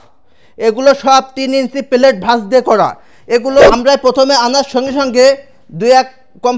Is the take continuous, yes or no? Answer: no